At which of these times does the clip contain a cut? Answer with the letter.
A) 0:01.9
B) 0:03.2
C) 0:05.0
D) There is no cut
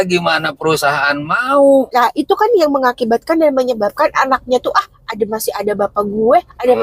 A